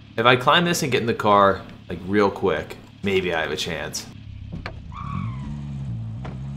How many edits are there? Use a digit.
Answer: 1